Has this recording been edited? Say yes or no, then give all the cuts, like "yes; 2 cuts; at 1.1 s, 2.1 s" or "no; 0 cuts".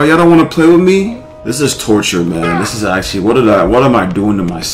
yes; 1 cut; at 1.2 s